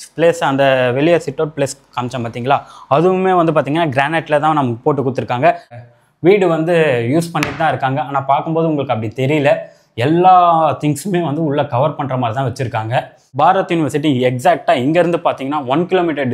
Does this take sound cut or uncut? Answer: cut